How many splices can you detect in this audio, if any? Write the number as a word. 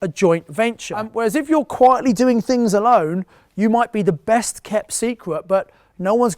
one